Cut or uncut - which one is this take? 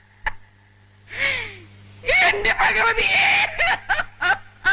uncut